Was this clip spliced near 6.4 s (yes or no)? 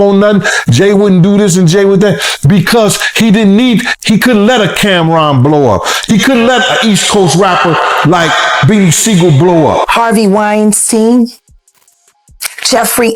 no